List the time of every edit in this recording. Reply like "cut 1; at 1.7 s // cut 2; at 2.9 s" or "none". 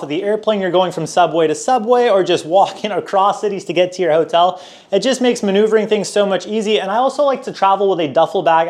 none